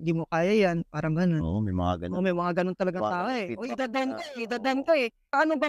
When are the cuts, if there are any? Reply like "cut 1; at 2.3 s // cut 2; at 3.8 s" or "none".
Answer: none